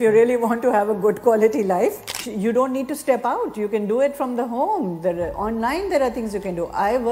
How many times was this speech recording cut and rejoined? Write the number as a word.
one